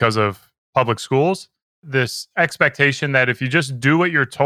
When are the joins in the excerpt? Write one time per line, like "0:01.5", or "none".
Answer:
0:01.9